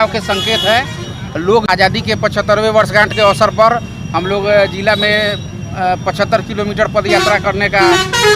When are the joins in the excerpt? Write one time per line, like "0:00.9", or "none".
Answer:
0:01.7